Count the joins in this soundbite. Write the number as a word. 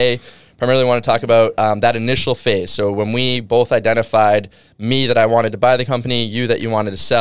zero